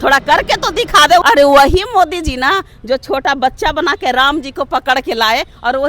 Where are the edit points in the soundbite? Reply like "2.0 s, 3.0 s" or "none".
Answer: 1.2 s